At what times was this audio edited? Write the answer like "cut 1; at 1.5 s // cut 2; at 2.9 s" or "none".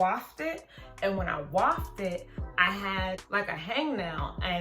cut 1; at 2.4 s // cut 2; at 3.2 s